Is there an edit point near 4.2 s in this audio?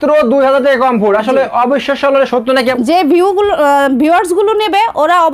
no; 1 cut; at 2.7 s

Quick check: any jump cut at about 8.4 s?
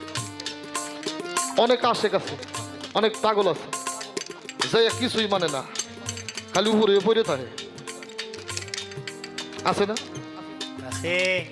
no; 0 cuts

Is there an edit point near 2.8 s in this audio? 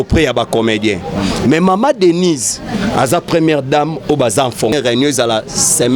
no; 1 cut; at 4.7 s

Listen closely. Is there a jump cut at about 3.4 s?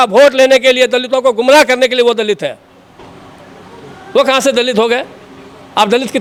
no; 0 cuts

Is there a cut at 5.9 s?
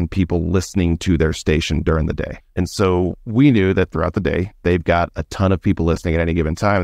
no; 2 cuts; at 2.4 s, 4.5 s

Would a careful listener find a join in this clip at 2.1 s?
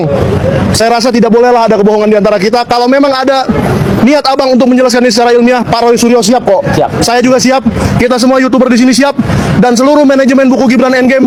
no; 0 cuts

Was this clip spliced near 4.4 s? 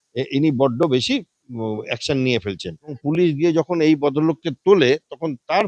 no; 1 cut; at 3.0 s

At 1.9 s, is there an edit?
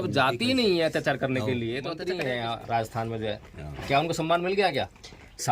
yes; 1 cut; at 1.9 s

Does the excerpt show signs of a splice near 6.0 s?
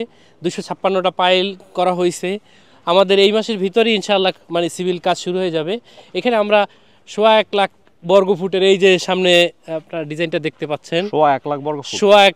no; 0 cuts

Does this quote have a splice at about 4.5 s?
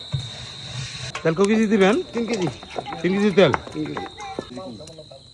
yes; 2 cuts; at 1.1 s, 4.5 s

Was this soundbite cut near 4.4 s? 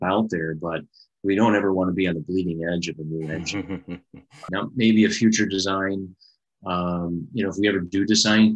yes; 1 cut; at 4.4 s

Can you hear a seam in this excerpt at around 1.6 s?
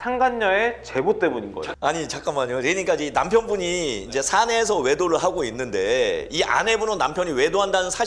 no; 0 cuts

